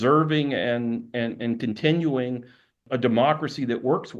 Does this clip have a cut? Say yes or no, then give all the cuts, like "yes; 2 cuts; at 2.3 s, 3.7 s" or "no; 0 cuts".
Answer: yes; 1 cut; at 2.8 s